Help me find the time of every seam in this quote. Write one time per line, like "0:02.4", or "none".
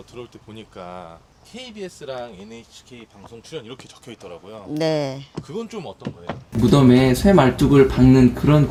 none